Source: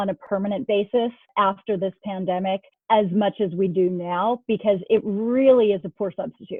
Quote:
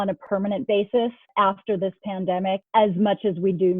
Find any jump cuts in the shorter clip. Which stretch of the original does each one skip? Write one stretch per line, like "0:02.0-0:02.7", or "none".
0:02.6-0:02.8